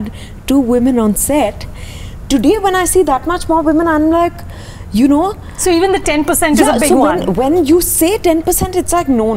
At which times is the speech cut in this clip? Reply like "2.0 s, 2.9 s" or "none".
none